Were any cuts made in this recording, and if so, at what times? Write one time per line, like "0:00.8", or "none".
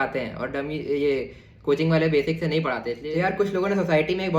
0:02.9